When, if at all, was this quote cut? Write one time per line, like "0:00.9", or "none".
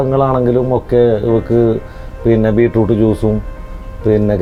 none